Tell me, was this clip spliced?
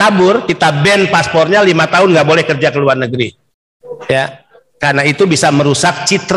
no; 0 cuts

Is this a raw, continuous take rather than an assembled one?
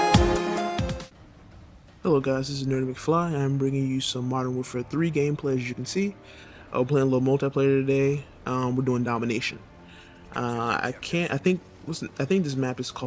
no; 1 cut; at 8.6 s

